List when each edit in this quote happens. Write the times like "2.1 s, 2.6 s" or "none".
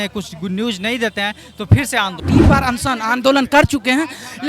2.2 s